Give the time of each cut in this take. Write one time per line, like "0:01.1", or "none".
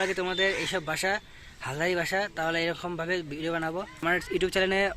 0:04.0